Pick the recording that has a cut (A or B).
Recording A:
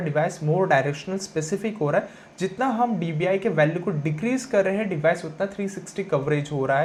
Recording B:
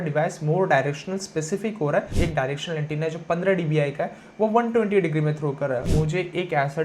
B